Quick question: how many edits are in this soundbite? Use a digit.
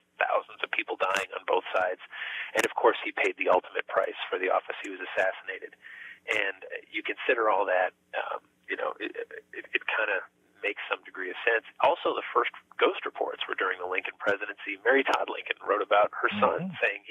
0